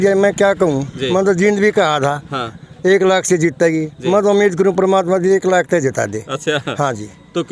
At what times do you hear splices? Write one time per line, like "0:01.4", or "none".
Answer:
none

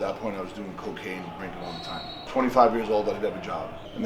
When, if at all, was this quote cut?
0:01.7

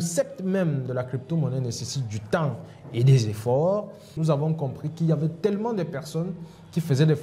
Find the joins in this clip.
0:04.1

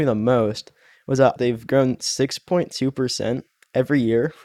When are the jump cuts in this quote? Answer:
0:01.1

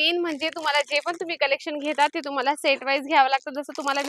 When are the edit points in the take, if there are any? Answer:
none

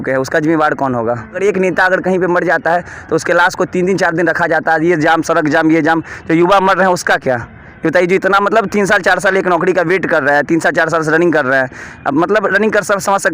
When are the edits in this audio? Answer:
0:01.4

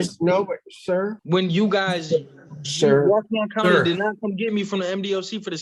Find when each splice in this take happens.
0:01.2

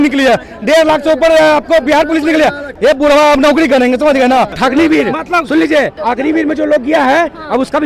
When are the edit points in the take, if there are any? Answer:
0:02.7
0:04.6
0:06.0

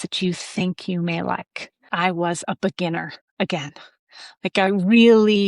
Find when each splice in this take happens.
0:01.9

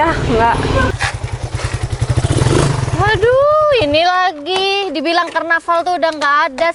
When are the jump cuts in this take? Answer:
0:00.9

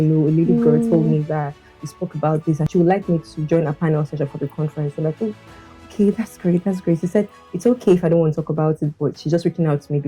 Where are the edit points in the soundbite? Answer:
0:02.7

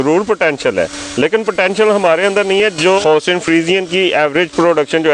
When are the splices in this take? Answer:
0:03.0

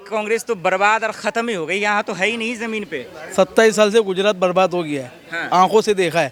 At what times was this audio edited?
none

